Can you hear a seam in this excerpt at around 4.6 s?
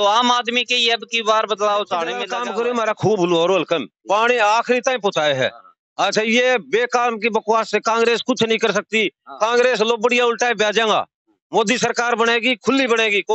no; 1 cut; at 2.3 s

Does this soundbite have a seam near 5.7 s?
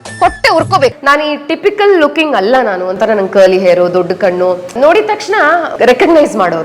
yes; 3 cuts; at 1.0 s, 4.7 s, 5.7 s

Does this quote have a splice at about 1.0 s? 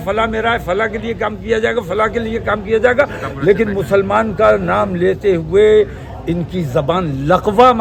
no; 0 cuts

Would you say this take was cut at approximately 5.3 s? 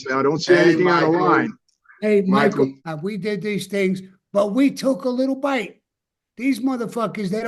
no; 1 cut; at 2.9 s

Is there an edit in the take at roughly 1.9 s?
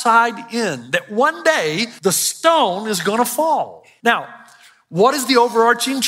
yes; 2 cuts; at 1.9 s, 3.8 s

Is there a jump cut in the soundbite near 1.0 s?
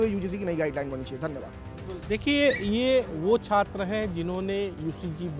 no; 0 cuts

